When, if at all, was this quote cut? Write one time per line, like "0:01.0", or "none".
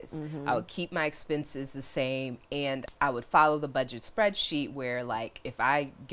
0:02.8